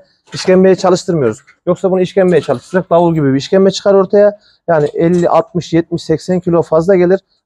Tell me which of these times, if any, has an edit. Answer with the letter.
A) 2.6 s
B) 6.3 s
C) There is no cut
C